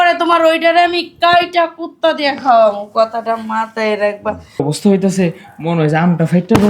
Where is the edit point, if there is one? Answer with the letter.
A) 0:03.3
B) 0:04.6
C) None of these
B